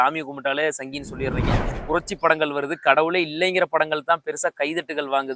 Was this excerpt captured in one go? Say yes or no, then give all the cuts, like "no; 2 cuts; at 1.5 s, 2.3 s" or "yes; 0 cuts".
no; 1 cut; at 1.7 s